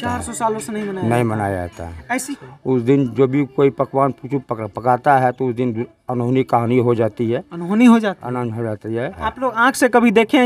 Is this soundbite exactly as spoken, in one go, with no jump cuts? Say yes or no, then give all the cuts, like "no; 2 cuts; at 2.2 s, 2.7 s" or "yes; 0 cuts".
no; 2 cuts; at 2.1 s, 9.2 s